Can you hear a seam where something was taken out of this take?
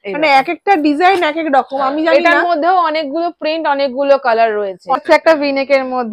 yes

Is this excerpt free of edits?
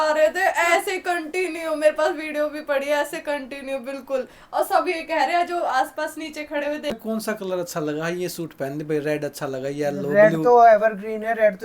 no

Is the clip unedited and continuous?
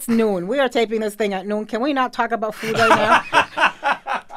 yes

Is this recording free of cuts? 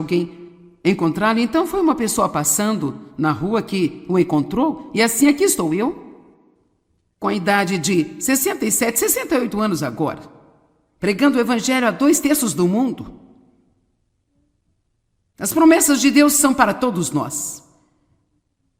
no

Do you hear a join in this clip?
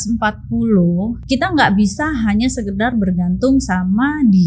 yes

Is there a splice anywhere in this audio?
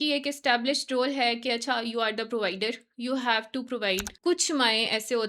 yes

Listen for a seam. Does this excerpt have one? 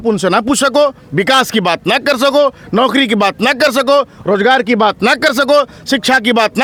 no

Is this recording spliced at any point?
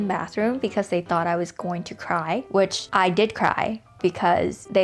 no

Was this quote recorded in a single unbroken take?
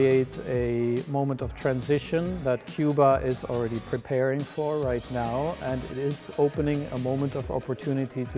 yes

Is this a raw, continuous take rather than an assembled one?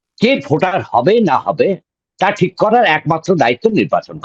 yes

